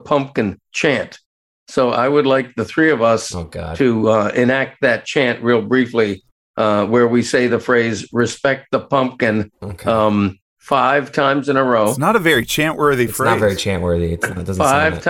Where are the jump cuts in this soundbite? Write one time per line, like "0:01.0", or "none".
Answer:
none